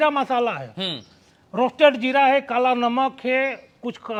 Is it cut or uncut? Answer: uncut